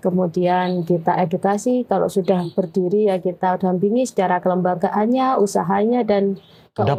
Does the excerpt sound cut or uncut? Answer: uncut